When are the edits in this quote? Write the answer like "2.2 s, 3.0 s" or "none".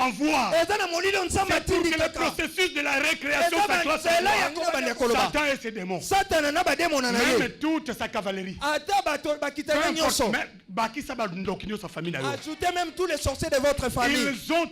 4.6 s